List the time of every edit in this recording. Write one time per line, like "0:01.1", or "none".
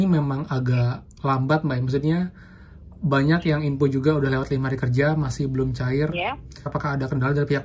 0:06.7